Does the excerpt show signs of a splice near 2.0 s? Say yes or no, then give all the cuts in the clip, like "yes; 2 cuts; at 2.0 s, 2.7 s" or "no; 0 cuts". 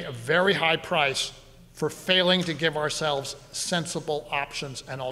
no; 0 cuts